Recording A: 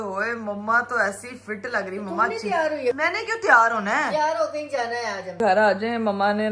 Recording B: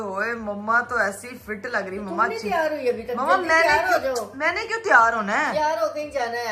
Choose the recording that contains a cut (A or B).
A